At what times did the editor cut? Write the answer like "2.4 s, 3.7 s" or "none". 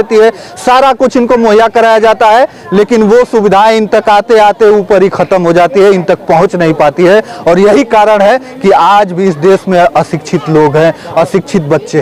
none